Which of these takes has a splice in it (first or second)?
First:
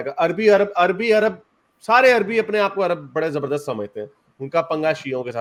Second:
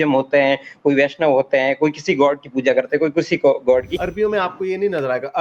second